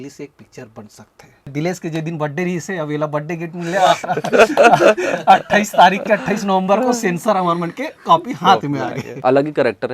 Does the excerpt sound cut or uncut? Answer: cut